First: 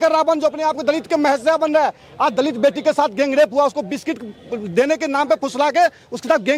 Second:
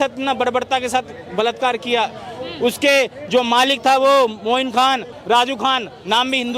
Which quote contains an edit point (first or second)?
second